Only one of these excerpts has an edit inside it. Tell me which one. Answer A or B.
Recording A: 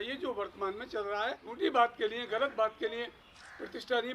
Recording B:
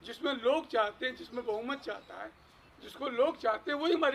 A